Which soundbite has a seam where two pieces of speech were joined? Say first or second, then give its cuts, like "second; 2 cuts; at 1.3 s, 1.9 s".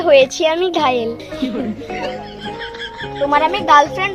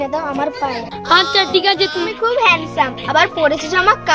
second; 1 cut; at 2.1 s